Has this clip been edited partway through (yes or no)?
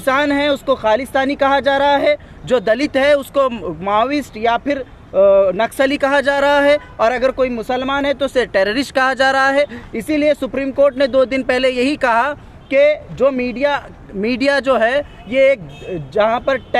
no